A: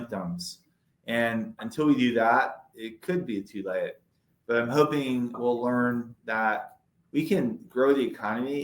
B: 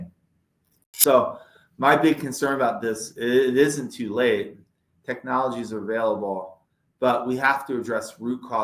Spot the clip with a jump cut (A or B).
A